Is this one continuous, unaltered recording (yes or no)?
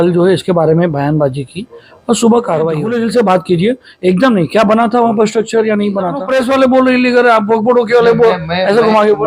no